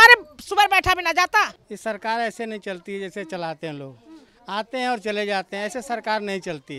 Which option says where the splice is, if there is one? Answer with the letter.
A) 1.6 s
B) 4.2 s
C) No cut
A